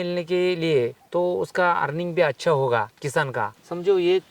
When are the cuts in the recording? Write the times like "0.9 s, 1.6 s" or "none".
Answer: 1.0 s, 3.3 s